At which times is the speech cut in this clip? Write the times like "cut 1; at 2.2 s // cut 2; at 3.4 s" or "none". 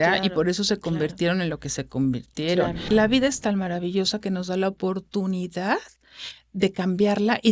cut 1; at 2.8 s